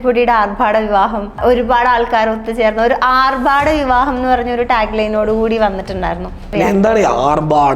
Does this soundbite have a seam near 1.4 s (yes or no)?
yes